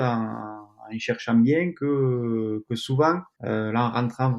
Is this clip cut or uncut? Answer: cut